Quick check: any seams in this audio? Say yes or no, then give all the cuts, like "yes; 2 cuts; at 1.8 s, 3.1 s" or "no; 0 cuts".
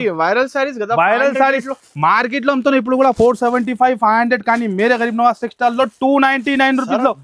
no; 0 cuts